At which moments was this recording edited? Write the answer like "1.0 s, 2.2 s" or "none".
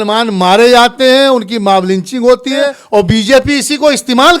2.8 s